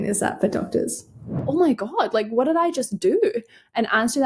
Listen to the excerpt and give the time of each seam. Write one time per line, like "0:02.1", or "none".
0:01.4